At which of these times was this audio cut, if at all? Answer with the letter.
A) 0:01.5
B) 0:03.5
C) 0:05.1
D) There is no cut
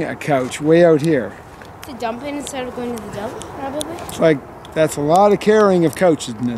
D